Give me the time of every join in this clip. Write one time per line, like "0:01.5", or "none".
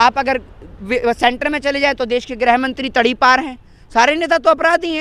none